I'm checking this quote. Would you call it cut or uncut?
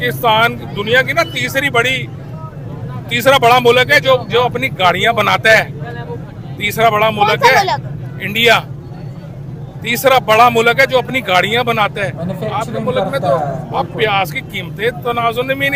uncut